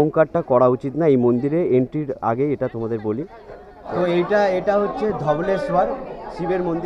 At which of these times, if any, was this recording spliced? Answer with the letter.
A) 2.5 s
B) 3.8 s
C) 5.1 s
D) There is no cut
B